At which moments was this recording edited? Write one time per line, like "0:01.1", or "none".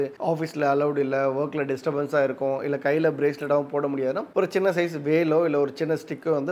none